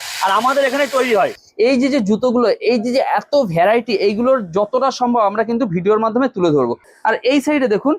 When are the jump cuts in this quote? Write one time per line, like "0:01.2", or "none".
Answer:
0:01.4
0:06.9